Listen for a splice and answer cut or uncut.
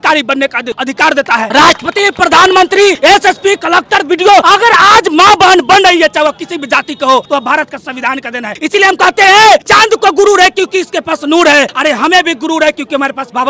cut